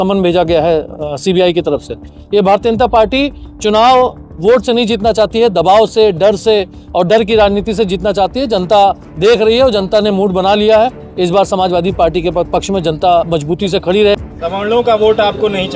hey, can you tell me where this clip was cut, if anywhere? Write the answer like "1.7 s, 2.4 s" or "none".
14.2 s